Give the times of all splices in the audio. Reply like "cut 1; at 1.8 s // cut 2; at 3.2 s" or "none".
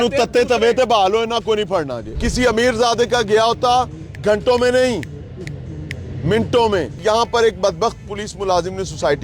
cut 1; at 2.0 s // cut 2; at 7.0 s